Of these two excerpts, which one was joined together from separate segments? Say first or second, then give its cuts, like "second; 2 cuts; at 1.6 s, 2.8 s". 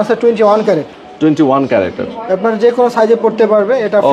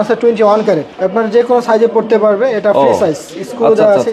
second; 1 cut; at 0.9 s